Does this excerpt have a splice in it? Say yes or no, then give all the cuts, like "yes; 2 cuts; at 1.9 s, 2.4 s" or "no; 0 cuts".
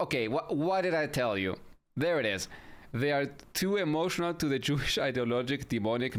no; 0 cuts